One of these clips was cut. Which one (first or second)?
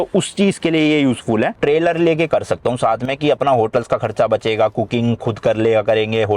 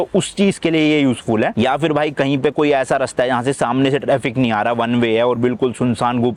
first